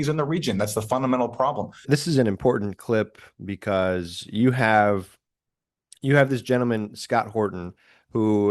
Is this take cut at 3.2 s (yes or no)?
no